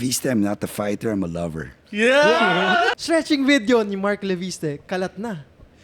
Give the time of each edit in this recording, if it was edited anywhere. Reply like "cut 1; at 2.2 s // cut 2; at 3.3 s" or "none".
cut 1; at 2.9 s

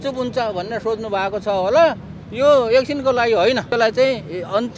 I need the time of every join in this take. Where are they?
cut 1; at 3.7 s

